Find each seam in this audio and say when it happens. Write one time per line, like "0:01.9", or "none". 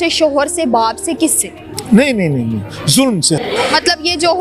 0:03.4